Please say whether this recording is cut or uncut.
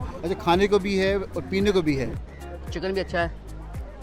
cut